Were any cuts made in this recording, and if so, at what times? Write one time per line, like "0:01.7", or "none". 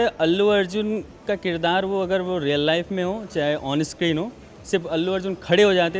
none